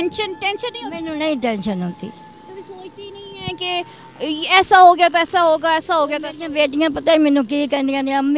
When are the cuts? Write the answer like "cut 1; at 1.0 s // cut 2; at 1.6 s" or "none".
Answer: none

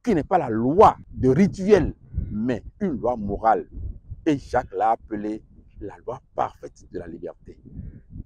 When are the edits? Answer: cut 1; at 1.1 s

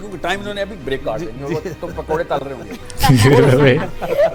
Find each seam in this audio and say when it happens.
none

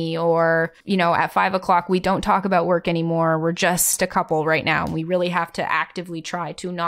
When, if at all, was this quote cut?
cut 1; at 3.9 s

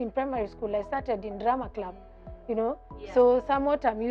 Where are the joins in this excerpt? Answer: none

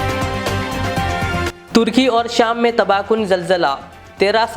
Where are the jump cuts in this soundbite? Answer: none

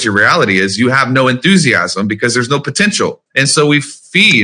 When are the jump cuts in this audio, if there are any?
cut 1; at 3.3 s

